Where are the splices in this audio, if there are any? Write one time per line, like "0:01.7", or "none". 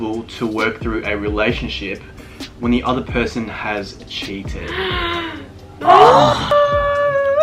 none